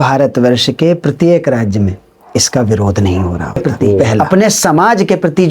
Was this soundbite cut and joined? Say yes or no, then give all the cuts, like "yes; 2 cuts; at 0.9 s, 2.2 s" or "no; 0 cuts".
yes; 1 cut; at 4.2 s